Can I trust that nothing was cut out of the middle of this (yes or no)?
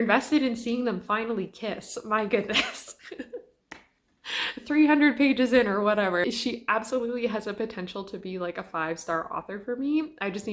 yes